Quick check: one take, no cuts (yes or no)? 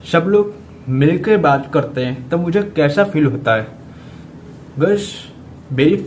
yes